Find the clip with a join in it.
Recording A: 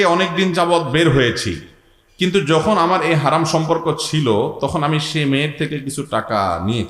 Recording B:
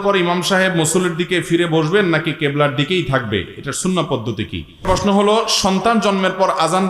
B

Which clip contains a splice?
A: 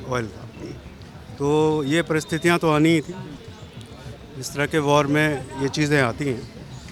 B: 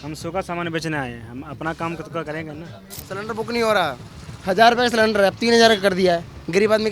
B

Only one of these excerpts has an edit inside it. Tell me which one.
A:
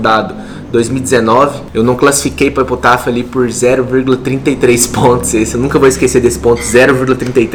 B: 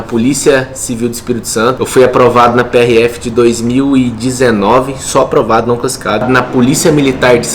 B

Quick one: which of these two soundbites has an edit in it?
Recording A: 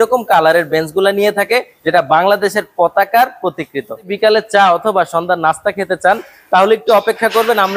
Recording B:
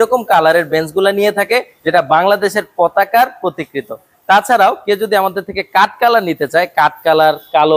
A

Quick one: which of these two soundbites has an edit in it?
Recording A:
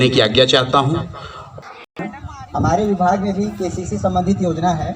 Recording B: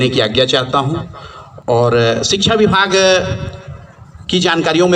A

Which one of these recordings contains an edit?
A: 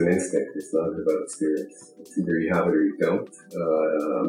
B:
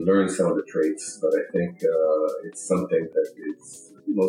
B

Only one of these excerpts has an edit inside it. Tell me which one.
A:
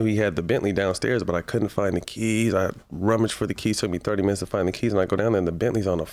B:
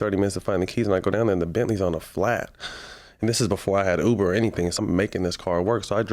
B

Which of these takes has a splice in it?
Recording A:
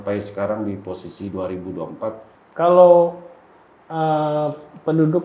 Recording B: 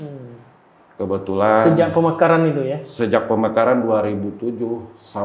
A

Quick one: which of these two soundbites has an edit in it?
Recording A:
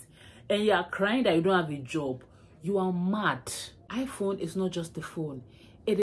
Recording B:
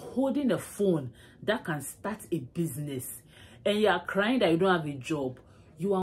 A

